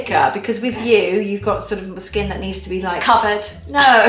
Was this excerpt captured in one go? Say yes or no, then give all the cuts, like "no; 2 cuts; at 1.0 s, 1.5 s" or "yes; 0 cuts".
yes; 0 cuts